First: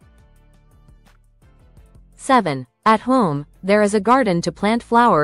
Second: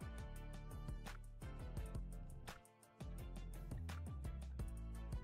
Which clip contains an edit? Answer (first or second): first